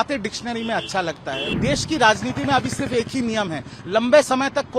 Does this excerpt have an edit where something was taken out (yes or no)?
yes